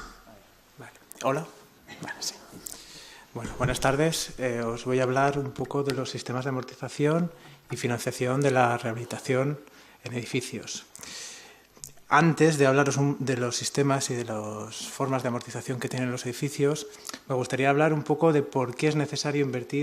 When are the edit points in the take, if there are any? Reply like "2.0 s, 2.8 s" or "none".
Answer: 15.3 s